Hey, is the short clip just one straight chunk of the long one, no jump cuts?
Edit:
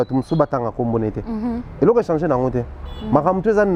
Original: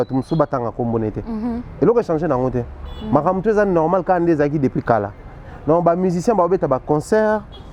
yes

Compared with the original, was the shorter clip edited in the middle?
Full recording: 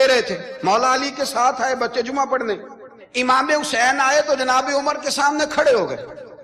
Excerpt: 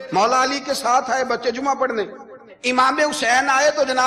no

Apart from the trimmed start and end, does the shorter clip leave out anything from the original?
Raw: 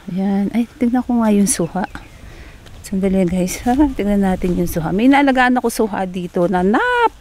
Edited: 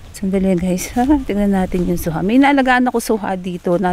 no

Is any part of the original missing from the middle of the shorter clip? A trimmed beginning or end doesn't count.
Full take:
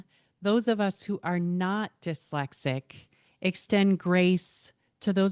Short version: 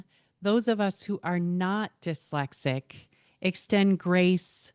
no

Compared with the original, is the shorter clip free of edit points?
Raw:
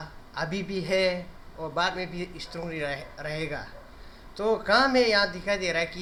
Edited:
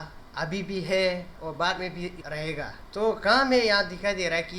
no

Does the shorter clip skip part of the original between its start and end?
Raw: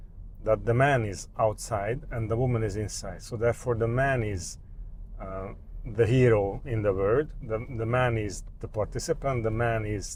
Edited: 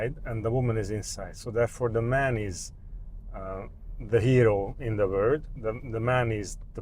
no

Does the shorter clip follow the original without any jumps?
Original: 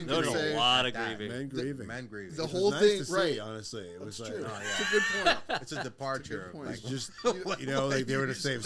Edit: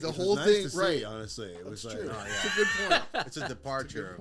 yes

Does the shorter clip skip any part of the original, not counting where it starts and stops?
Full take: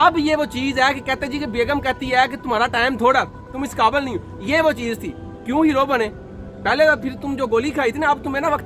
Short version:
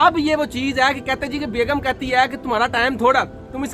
no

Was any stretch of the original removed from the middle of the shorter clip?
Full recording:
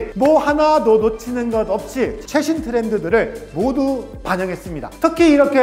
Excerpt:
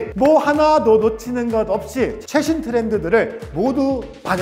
no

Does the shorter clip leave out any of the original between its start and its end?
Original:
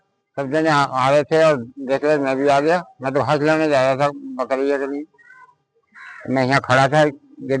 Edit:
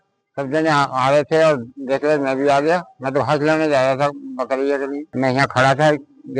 yes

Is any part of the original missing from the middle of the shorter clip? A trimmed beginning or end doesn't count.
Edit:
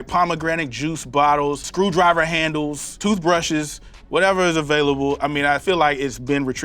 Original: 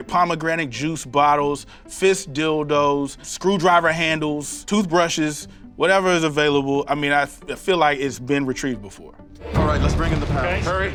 yes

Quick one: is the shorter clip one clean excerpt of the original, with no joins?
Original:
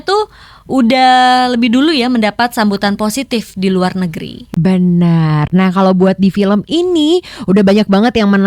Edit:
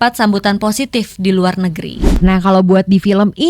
no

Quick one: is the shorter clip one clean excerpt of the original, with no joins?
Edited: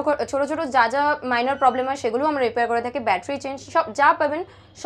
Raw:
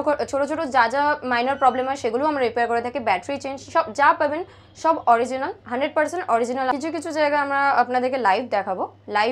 yes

